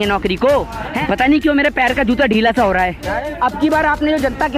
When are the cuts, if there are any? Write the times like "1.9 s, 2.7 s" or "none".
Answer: 0.9 s, 3.3 s